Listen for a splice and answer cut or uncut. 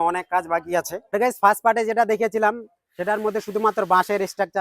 cut